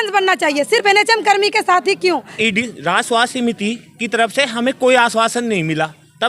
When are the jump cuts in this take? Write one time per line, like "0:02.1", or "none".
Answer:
0:02.3